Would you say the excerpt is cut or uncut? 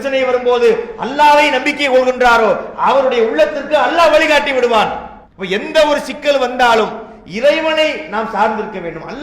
uncut